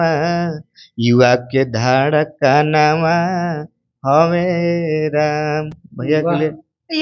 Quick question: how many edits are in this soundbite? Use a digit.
0